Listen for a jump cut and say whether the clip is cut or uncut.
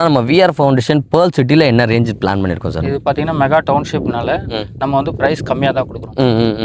uncut